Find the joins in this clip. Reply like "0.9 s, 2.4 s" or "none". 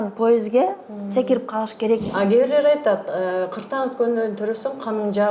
2.1 s